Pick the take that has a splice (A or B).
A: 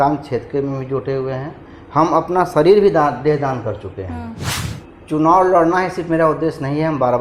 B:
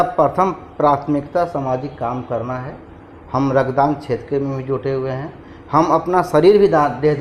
A